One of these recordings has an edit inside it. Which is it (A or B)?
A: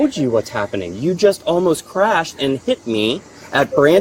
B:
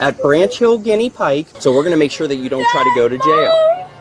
B